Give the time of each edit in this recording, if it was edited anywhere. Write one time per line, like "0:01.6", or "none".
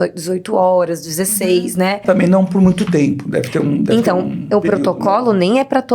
0:02.0

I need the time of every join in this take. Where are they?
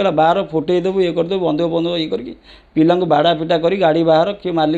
none

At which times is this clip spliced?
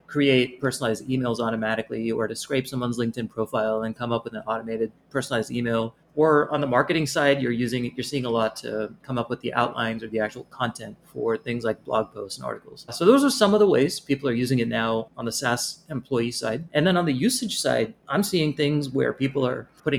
none

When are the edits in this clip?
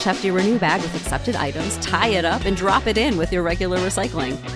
none

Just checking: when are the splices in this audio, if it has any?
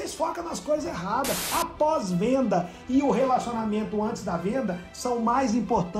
0:01.4

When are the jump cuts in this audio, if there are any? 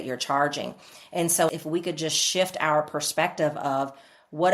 0:01.5

